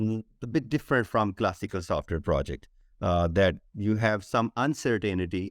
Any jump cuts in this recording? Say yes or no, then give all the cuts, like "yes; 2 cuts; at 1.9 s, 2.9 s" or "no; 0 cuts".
no; 0 cuts